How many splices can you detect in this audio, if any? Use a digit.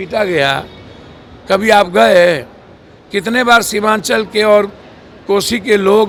0